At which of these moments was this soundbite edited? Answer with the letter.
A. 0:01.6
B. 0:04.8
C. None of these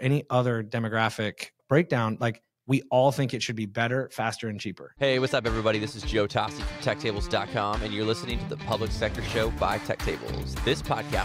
B